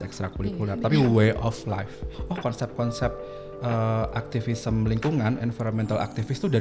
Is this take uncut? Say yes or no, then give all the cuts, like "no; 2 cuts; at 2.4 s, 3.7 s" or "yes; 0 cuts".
no; 1 cut; at 2.0 s